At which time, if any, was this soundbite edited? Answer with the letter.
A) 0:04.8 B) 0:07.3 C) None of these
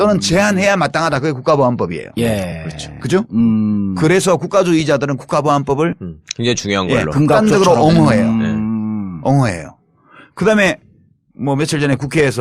B